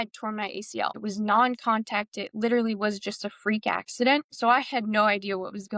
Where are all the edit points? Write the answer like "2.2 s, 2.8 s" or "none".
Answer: 1.0 s, 4.3 s